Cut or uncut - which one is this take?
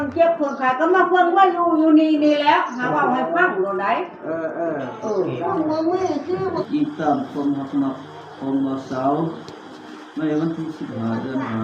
cut